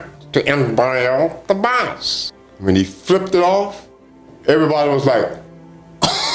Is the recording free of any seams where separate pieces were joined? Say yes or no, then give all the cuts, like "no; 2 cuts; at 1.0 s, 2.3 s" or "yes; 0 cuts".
yes; 0 cuts